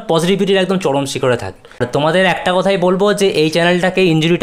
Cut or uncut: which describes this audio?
cut